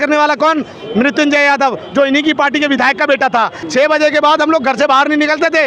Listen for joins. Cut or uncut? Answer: cut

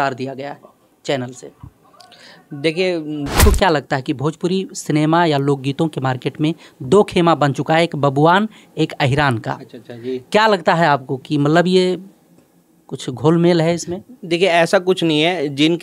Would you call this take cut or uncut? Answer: cut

